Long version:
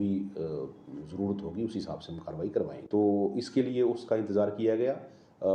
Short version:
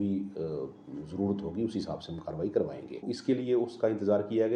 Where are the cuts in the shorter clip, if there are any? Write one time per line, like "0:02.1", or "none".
0:02.9